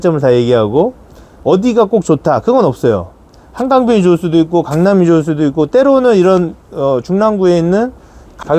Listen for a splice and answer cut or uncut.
uncut